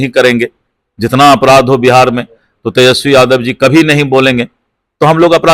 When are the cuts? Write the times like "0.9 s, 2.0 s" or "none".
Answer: none